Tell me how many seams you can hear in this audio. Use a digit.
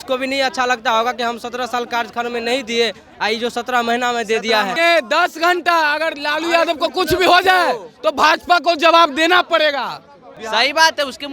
2